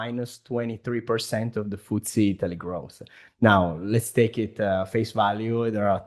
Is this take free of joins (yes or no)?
yes